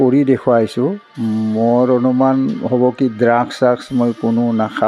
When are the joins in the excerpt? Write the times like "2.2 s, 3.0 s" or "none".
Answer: none